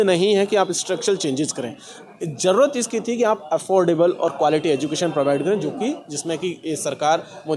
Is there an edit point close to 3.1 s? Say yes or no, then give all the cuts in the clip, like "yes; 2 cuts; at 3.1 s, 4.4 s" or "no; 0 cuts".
no; 0 cuts